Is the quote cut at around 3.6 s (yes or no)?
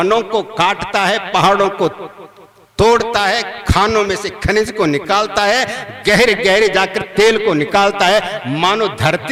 no